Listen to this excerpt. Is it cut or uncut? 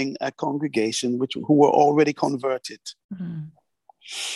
uncut